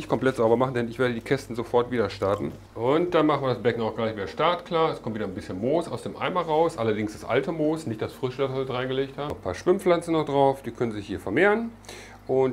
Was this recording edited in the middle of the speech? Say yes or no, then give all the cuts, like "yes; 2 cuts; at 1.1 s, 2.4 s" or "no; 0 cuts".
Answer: yes; 2 cuts; at 2.6 s, 9.3 s